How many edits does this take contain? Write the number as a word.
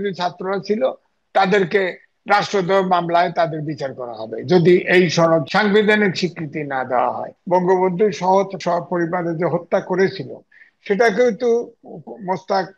three